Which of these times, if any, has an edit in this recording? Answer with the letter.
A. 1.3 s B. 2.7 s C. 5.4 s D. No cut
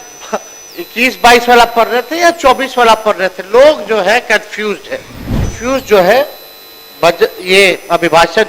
C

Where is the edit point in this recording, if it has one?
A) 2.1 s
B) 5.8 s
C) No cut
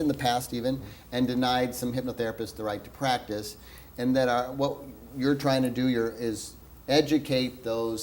A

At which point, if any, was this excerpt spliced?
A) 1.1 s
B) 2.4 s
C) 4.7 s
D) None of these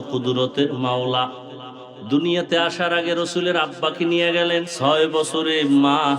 C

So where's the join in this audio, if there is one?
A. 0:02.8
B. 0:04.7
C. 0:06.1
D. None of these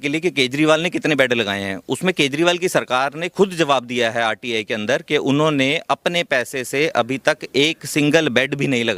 D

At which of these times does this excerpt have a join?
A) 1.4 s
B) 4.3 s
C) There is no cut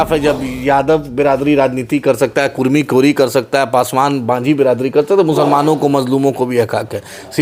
C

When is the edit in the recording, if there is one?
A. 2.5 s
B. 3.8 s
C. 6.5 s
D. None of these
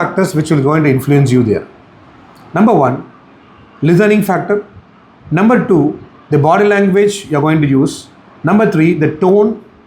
D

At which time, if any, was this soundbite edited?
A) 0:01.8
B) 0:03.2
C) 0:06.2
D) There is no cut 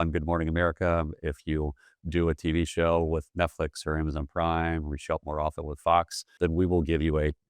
C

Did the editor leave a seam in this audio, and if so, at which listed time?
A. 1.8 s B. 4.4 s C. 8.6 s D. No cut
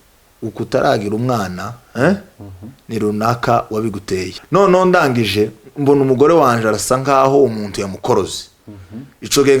B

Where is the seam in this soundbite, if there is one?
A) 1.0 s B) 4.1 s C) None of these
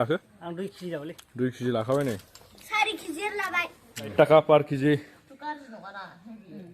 B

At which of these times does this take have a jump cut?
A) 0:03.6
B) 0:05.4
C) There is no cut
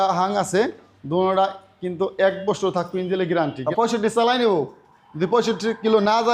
A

